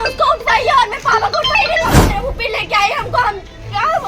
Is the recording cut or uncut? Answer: cut